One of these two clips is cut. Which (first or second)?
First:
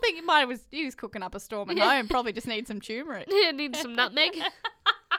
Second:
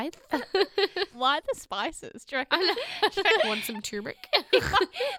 second